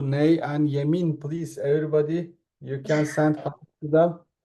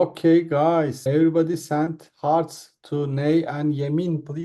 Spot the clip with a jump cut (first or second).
second